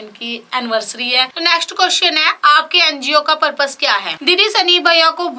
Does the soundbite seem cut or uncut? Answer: cut